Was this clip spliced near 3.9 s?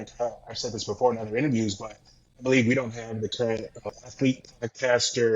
yes; 1 cut; at 3.9 s

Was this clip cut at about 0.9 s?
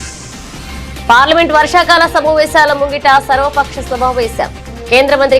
yes; 1 cut; at 0.9 s

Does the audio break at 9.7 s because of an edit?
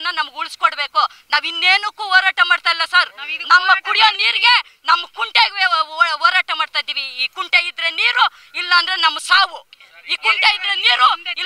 no; 0 cuts

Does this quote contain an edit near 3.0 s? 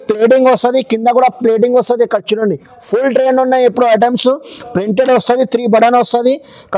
no; 0 cuts

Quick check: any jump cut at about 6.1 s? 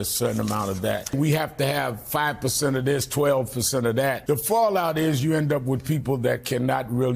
no; 2 cuts; at 1.1 s, 4.2 s

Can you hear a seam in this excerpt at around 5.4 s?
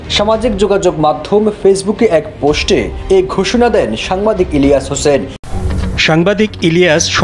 yes; 1 cut; at 5.4 s

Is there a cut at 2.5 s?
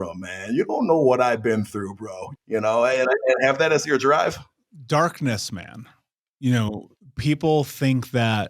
yes; 1 cut; at 2.5 s

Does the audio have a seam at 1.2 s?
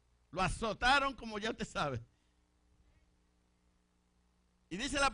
no; 1 cut; at 3.8 s

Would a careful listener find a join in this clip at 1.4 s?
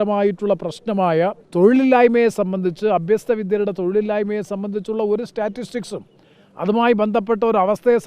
yes; 1 cut; at 1.4 s

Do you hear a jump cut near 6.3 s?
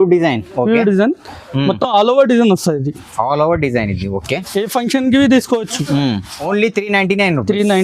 yes; 1 cut; at 6.3 s

